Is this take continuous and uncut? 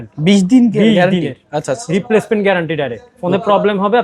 yes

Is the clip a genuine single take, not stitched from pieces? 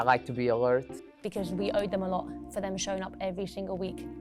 no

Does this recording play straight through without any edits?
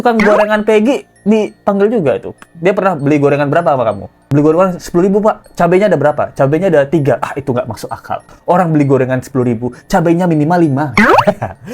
yes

